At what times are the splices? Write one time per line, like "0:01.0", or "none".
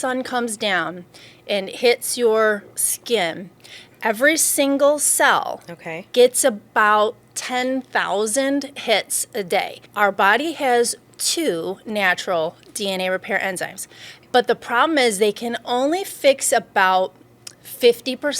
0:09.8
0:14.1